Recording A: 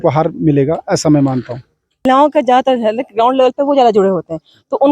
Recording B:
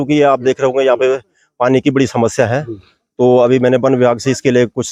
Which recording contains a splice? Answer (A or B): A